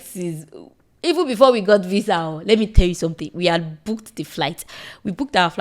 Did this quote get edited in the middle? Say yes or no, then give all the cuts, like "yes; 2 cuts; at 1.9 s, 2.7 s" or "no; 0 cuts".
no; 0 cuts